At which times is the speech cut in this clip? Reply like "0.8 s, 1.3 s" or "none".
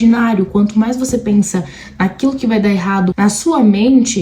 3.1 s

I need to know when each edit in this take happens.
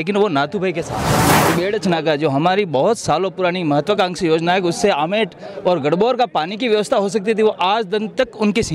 1.2 s

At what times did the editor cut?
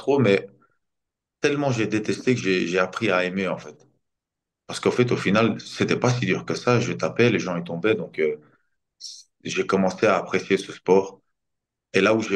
none

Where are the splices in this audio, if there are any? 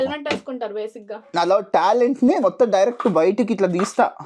1.3 s

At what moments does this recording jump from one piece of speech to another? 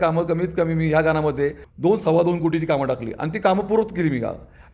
1.6 s

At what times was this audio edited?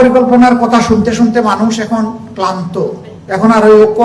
3.1 s

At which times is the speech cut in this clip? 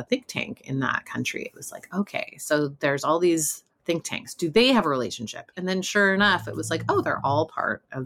none

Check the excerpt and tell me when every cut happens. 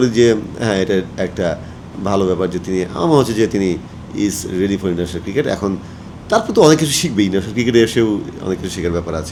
none

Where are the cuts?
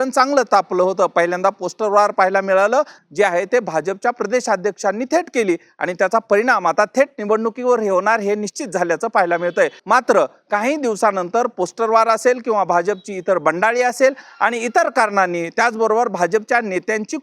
3.0 s, 9.8 s

